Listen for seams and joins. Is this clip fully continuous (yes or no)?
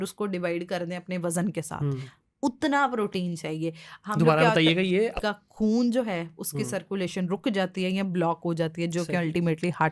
no